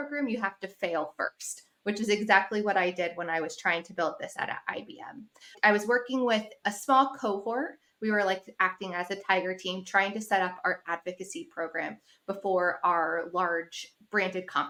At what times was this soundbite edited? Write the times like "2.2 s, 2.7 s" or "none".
none